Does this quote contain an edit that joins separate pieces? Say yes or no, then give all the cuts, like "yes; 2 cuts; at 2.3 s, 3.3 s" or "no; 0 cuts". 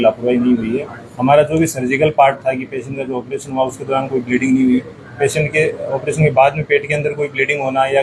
no; 0 cuts